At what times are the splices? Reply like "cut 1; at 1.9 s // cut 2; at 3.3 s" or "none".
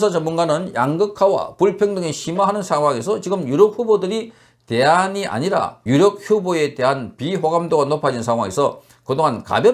cut 1; at 5.8 s